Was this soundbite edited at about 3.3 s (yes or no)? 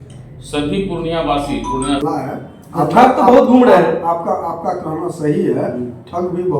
no